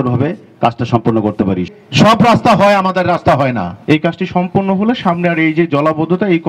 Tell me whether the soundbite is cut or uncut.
cut